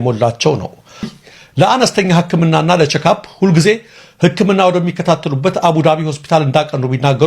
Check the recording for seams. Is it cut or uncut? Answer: cut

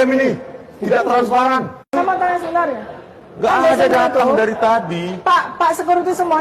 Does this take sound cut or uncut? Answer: cut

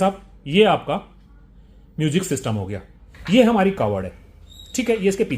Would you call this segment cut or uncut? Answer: cut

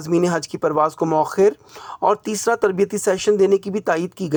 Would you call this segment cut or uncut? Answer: uncut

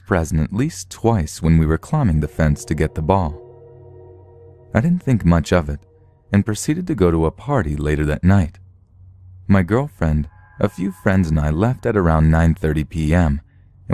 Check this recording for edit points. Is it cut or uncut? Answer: cut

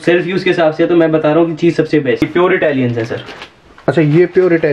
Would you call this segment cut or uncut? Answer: cut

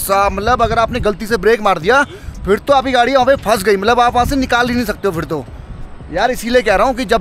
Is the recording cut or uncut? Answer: uncut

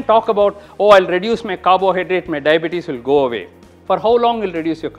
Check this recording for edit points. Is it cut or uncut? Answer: uncut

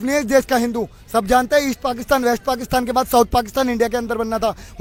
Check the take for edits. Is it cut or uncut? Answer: uncut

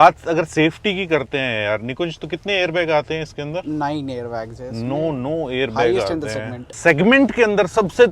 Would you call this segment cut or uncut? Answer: cut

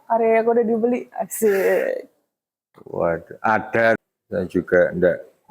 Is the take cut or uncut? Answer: cut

